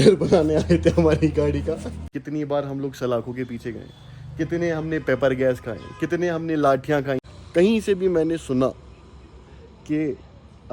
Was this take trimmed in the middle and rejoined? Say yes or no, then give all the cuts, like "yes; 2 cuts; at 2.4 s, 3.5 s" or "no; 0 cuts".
yes; 2 cuts; at 2.1 s, 7.2 s